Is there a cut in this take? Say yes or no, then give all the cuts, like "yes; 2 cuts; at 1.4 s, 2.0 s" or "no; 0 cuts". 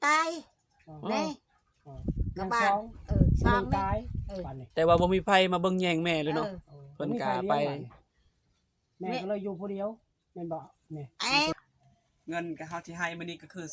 yes; 1 cut; at 11.5 s